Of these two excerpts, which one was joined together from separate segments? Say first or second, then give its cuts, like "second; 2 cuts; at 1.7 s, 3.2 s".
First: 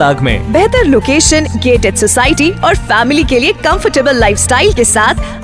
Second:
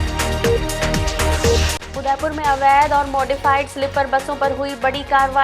second; 1 cut; at 1.7 s